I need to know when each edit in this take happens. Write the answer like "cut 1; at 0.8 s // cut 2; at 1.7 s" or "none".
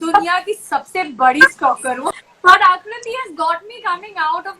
cut 1; at 2.2 s